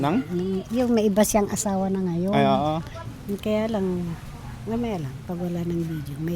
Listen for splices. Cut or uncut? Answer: cut